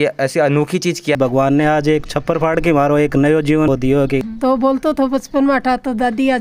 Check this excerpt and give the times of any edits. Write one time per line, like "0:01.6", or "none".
0:01.2
0:04.3